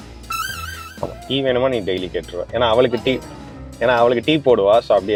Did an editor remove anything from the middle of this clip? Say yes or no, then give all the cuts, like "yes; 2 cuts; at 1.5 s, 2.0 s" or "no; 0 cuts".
no; 0 cuts